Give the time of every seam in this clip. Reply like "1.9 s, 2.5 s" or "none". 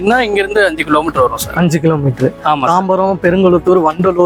none